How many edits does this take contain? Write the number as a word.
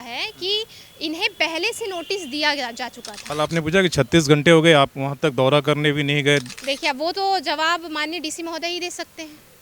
one